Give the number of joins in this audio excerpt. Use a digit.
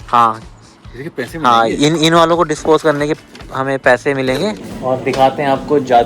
1